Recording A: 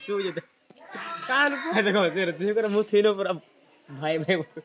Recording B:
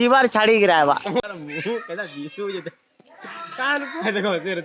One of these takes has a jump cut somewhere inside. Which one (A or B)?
B